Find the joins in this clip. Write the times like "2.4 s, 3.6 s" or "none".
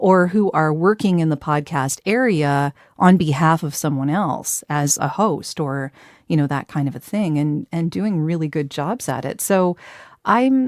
none